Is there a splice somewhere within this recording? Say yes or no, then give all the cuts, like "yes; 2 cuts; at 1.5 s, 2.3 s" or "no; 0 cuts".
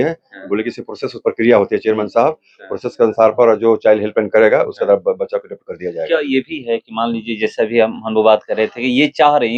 no; 0 cuts